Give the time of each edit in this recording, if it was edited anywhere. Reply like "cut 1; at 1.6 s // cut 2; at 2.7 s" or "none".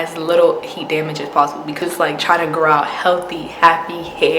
cut 1; at 1.8 s